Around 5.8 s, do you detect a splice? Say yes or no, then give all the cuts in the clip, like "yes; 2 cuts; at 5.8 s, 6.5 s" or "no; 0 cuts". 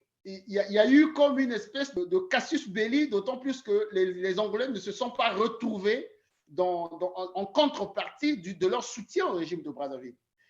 no; 1 cut; at 2.0 s